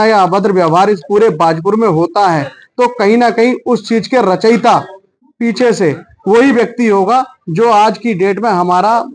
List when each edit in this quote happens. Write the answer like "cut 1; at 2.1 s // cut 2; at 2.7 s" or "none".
none